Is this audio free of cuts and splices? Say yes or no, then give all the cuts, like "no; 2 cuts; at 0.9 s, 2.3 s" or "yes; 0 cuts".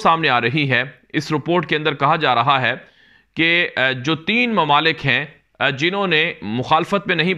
yes; 0 cuts